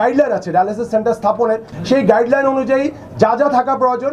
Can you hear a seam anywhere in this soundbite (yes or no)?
yes